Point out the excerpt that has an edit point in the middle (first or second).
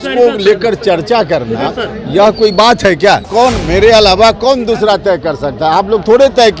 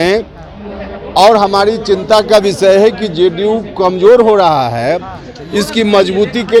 first